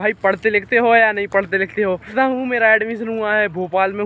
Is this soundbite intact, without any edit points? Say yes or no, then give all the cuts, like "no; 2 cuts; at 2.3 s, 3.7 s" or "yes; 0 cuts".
no; 1 cut; at 2.1 s